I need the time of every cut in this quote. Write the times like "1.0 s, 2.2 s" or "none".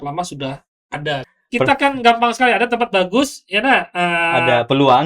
1.3 s